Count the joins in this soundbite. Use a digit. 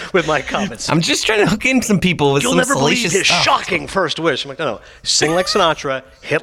1